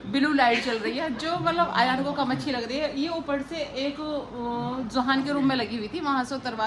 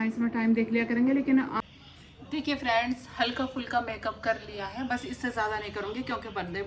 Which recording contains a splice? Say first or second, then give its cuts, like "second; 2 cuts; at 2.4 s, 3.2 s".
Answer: second; 1 cut; at 1.5 s